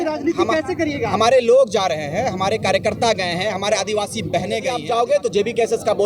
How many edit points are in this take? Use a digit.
1